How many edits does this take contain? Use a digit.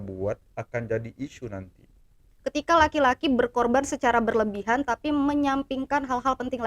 1